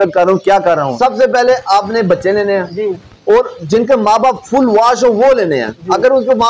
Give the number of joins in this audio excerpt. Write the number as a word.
one